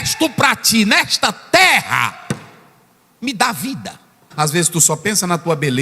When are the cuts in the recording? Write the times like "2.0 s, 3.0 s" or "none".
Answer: 4.3 s